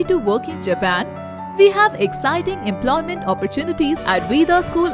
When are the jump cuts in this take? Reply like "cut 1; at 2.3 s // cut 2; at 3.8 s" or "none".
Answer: cut 1; at 4.0 s